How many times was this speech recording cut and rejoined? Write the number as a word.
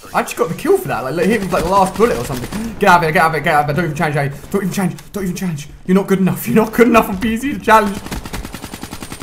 one